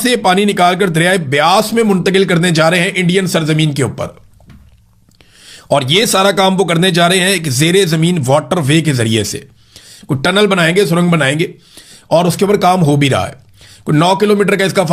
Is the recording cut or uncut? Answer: uncut